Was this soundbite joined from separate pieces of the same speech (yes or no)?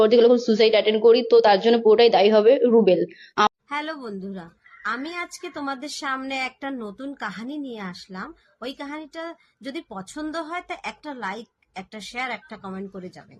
yes